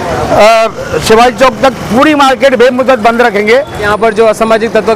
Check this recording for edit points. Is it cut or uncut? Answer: cut